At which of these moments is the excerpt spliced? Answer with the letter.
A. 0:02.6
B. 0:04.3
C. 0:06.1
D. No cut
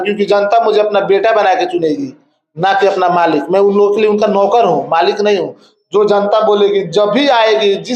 D